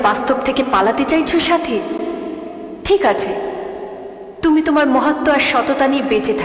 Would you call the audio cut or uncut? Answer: uncut